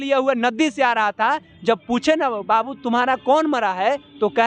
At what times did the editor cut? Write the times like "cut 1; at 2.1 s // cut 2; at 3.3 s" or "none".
none

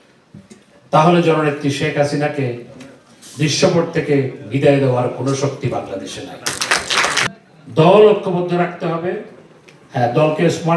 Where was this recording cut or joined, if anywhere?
cut 1; at 7.1 s

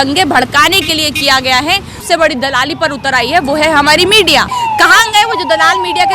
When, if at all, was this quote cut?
cut 1; at 2.0 s // cut 2; at 4.5 s

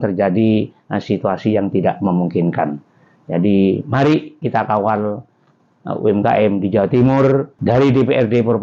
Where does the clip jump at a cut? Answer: cut 1; at 7.5 s

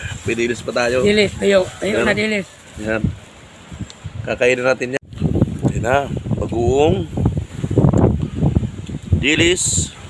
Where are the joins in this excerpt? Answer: cut 1; at 4.9 s

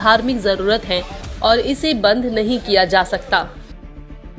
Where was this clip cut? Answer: cut 1; at 3.5 s

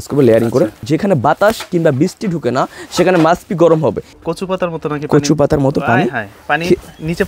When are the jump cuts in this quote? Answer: cut 1; at 0.8 s // cut 2; at 4.1 s

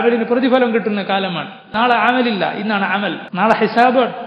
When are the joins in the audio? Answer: cut 1; at 1.7 s // cut 2; at 3.2 s

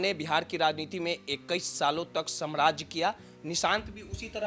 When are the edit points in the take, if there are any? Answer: none

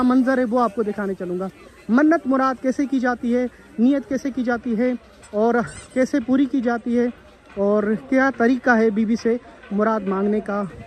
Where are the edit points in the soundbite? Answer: none

